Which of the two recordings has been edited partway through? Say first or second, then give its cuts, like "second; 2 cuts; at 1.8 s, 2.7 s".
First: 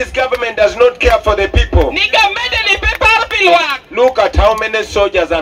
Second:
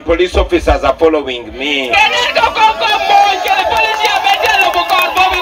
second; 1 cut; at 4.0 s